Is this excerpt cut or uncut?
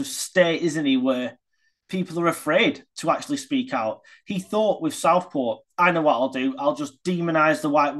uncut